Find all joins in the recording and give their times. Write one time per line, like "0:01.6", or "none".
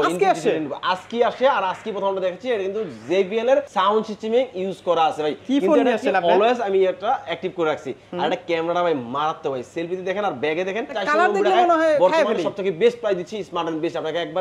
0:03.7
0:05.4
0:11.0